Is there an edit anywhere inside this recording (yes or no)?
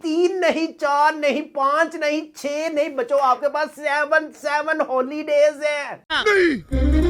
no